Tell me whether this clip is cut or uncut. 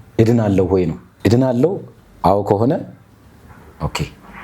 cut